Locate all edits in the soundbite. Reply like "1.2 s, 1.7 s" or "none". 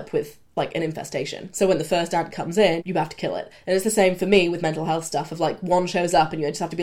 1.5 s, 2.8 s